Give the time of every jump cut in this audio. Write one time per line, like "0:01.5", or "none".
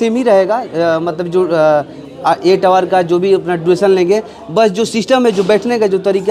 none